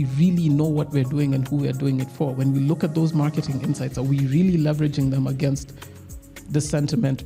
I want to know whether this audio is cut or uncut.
uncut